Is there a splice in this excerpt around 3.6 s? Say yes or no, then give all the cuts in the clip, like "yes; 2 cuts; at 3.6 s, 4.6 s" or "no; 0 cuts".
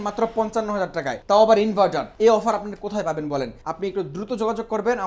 yes; 3 cuts; at 1.1 s, 2.1 s, 3.6 s